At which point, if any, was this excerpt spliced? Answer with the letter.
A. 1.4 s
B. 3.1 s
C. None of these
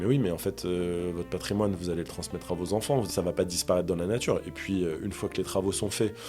B